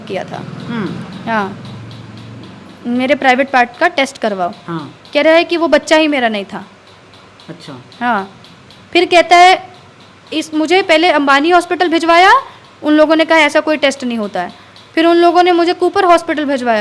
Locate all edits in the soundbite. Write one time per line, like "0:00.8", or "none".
none